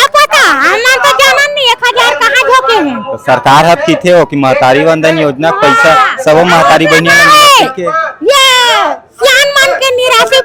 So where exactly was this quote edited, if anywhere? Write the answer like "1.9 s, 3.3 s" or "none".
none